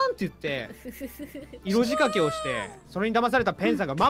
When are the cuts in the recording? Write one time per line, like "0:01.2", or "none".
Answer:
none